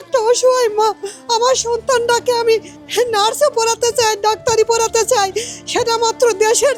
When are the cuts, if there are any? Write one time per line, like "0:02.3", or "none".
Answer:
none